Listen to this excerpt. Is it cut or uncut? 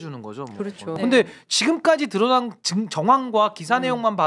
cut